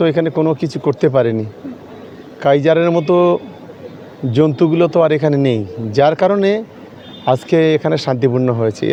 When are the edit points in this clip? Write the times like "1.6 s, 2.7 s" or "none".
none